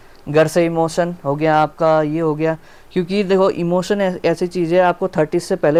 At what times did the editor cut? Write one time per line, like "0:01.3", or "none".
none